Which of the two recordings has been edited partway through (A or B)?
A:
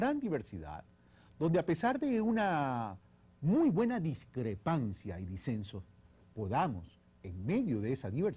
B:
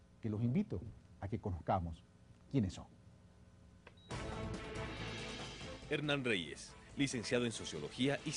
A